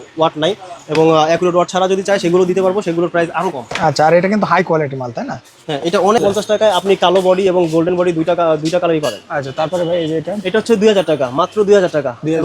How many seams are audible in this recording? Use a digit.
1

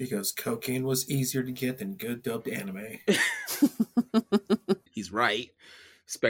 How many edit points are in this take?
1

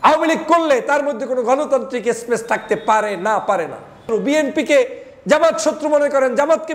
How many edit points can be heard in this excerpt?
1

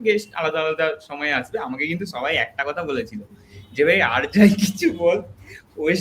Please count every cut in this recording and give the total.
0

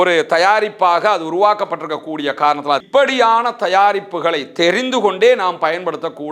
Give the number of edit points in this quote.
1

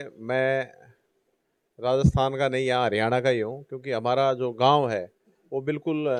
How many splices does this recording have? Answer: 0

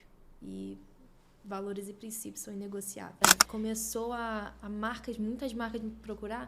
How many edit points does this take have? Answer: 1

